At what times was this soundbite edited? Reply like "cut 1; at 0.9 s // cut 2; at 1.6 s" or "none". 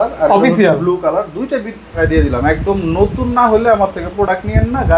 cut 1; at 1.9 s